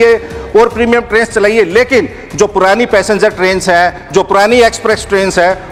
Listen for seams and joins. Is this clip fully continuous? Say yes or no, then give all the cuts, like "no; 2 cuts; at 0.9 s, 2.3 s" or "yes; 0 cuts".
yes; 0 cuts